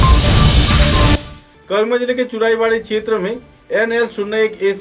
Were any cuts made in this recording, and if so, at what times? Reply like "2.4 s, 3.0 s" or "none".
1.3 s